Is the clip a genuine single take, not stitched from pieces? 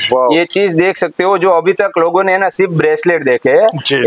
yes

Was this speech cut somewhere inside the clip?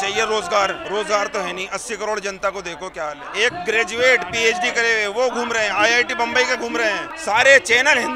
yes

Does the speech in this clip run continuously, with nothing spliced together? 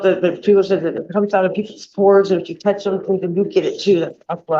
yes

